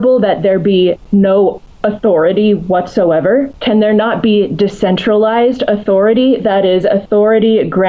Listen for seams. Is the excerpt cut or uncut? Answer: cut